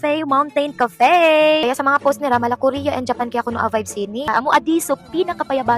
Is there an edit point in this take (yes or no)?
yes